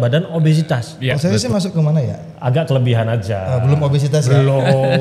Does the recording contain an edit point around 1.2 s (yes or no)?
yes